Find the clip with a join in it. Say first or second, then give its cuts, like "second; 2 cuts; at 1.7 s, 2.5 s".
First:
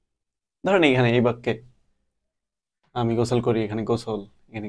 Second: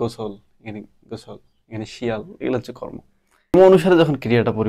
second; 1 cut; at 3.5 s